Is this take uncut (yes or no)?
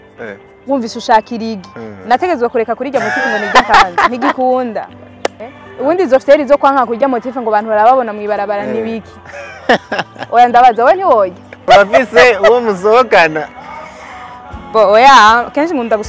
no